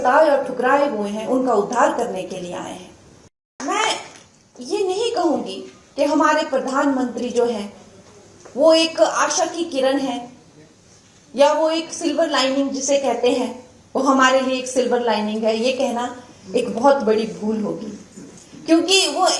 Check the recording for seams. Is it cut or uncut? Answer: cut